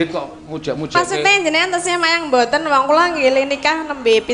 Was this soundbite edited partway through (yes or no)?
no